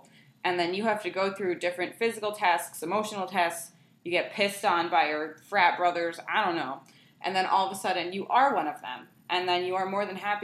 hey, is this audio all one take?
yes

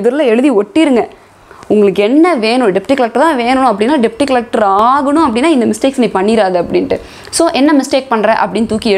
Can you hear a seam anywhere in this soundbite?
no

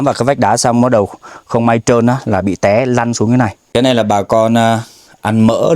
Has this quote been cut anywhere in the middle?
yes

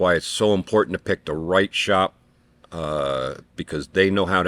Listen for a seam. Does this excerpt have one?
no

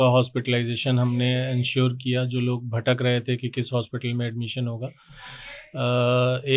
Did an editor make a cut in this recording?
no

